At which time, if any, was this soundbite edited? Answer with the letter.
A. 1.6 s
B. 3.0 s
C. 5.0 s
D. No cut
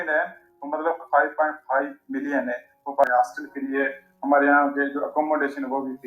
B